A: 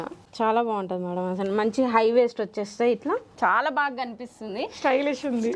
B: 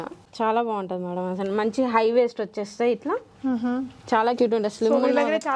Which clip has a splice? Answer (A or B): A